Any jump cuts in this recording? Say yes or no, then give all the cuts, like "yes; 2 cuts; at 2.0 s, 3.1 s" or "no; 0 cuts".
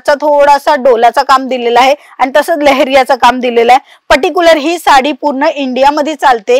no; 0 cuts